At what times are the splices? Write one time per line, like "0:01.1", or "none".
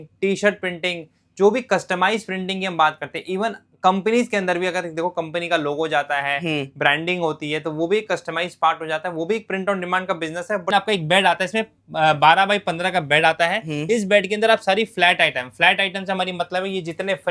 0:10.7